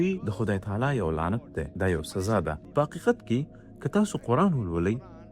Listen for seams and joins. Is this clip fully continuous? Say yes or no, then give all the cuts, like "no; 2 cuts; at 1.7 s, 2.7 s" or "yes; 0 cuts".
no; 1 cut; at 2.6 s